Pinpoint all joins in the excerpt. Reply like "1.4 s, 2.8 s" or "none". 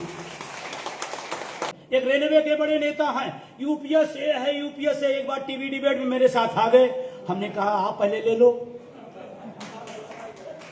1.7 s

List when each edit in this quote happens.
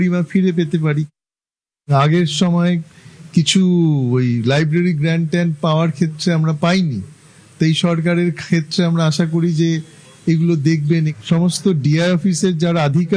1.8 s

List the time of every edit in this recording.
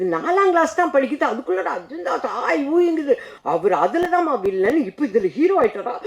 3.3 s

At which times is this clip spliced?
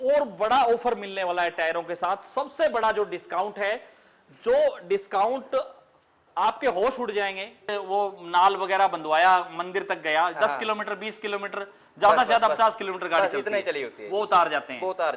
7.7 s

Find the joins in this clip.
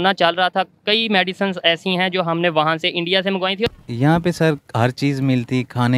3.7 s

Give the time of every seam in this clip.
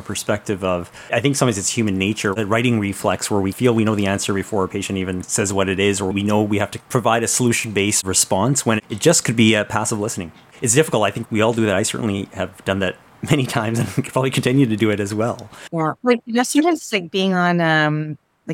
2.4 s, 10.5 s

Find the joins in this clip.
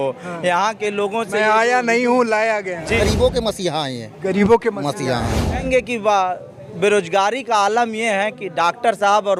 3.0 s, 5.6 s

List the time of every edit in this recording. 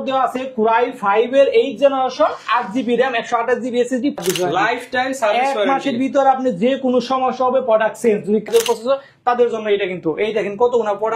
4.2 s, 8.5 s

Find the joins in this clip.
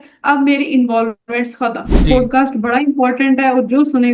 2.1 s

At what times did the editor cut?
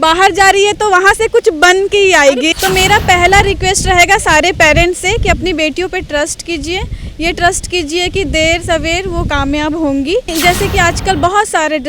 2.5 s, 10.3 s

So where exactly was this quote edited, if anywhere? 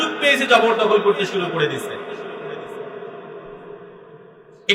none

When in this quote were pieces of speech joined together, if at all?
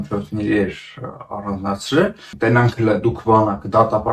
2.2 s

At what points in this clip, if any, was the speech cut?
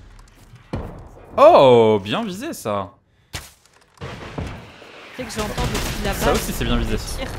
none

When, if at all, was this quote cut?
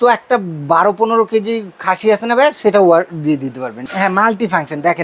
3.9 s

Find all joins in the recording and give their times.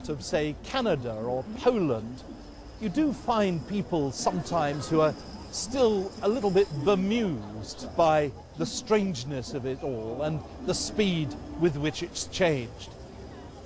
7.3 s

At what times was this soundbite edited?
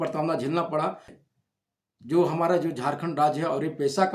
1.2 s

